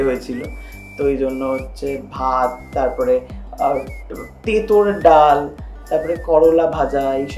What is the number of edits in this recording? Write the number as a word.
zero